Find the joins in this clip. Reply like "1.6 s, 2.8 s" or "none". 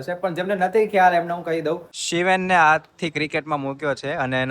1.9 s